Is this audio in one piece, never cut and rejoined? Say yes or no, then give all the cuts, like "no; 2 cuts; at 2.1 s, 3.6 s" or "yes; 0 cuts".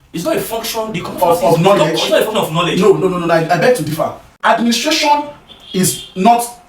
no; 1 cut; at 4.2 s